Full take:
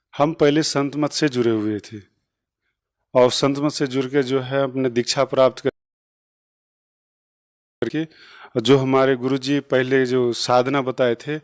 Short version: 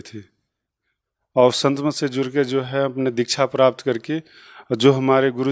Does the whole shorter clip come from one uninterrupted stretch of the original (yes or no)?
no